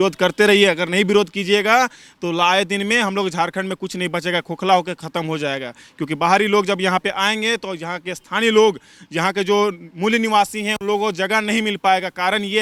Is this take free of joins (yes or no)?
yes